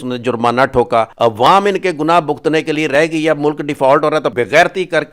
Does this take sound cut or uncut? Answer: cut